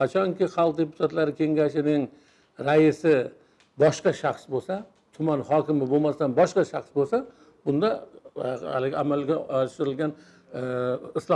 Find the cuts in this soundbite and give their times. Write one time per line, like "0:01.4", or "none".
none